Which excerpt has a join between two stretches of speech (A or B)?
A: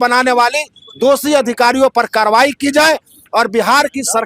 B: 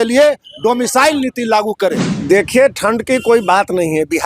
B